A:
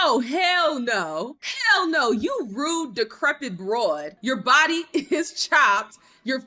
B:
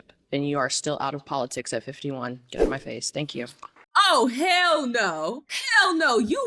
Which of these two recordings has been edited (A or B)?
A